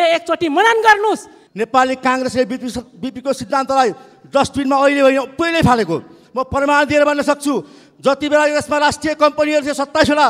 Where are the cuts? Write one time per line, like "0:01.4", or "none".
0:01.4

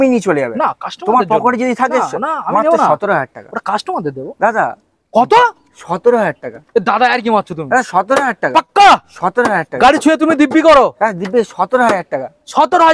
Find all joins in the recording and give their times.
none

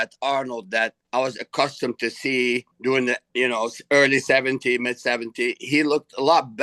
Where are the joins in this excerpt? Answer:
0:01.0
0:03.1

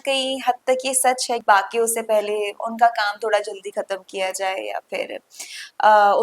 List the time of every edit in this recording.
0:01.4

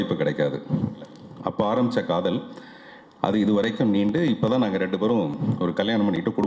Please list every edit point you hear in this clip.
0:01.2

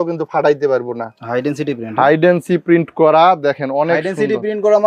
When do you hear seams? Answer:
none

